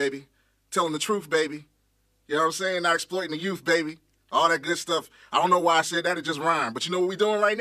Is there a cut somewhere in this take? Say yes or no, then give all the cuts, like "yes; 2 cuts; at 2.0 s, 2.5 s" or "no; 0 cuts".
no; 0 cuts